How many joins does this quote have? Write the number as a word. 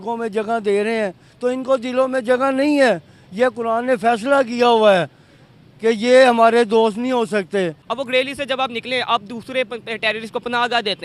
one